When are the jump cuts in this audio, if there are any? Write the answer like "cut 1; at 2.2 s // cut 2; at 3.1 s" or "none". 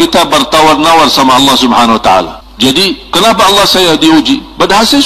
cut 1; at 2.4 s